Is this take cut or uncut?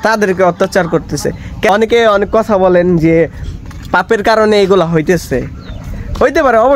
cut